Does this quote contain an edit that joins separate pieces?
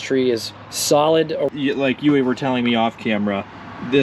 yes; 1 cut; at 1.5 s

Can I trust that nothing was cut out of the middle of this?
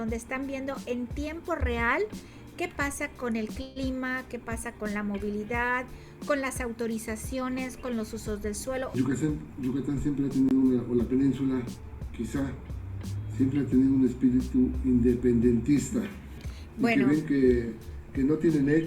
no; 2 cuts; at 9.0 s, 16.4 s

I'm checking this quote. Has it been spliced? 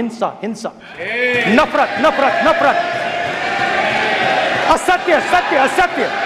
no; 0 cuts

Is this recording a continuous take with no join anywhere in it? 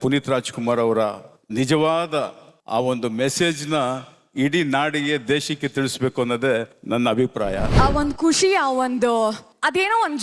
no; 1 cut; at 7.7 s

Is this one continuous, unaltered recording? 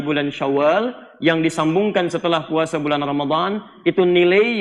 yes; 0 cuts

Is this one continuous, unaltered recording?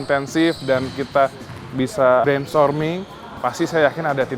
no; 1 cut; at 2.2 s

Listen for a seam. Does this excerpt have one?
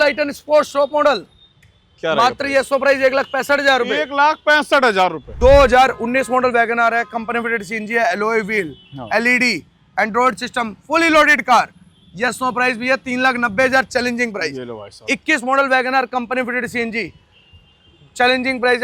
yes; 1 cut; at 5.2 s

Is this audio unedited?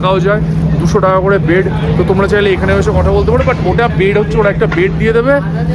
yes; 0 cuts

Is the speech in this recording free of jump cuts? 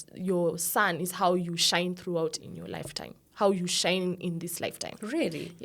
yes; 0 cuts

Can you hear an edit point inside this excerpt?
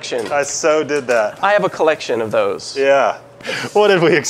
yes; 1 cut; at 3.4 s

